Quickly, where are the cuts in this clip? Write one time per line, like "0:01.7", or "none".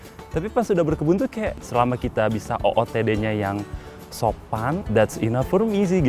0:01.6
0:04.8